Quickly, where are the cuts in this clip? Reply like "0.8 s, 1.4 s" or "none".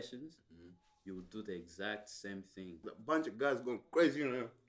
2.9 s